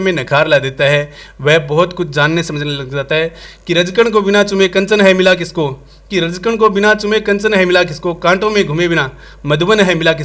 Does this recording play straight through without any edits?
no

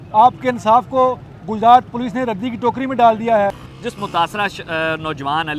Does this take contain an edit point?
yes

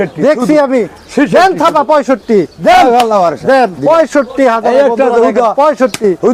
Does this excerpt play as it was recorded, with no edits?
yes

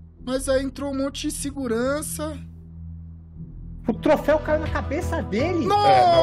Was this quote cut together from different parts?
no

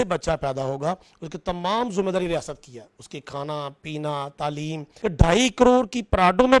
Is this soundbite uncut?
no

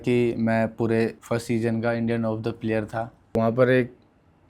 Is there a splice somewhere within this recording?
yes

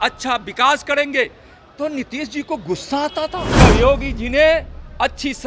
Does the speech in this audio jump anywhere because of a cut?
yes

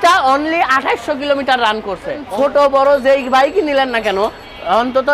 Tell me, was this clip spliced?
yes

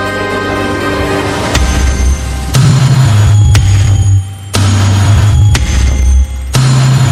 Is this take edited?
no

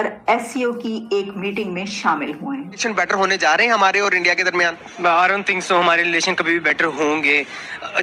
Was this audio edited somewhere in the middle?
yes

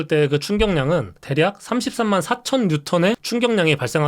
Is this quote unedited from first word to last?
no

